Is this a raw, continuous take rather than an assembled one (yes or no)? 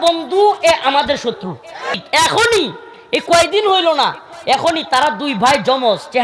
no